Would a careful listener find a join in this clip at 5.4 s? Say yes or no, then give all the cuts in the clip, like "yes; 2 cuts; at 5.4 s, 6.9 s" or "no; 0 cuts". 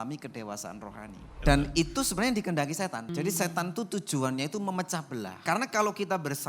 yes; 3 cuts; at 1.3 s, 3.1 s, 5.4 s